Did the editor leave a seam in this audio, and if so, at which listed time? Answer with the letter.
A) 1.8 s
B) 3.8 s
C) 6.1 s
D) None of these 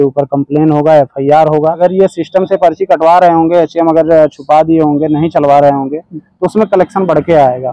A